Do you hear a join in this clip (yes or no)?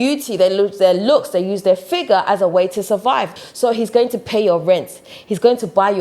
yes